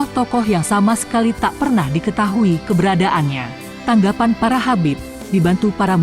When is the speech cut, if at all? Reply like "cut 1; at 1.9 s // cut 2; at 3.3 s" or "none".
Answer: cut 1; at 3.5 s